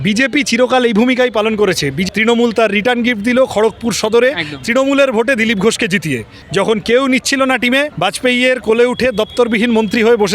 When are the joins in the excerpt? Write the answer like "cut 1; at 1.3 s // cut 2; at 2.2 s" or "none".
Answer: cut 1; at 2.0 s // cut 2; at 6.3 s // cut 3; at 7.9 s